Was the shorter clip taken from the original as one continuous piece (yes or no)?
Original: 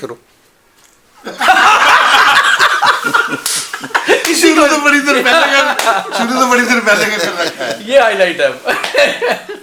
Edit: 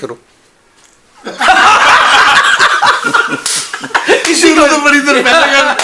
yes